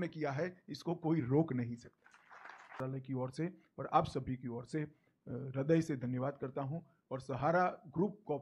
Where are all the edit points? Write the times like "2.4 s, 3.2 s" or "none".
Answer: 2.7 s